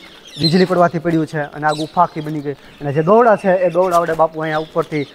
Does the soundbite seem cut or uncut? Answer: uncut